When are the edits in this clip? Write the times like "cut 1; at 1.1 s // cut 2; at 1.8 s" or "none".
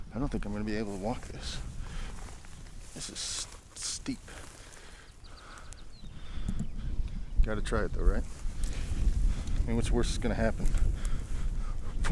none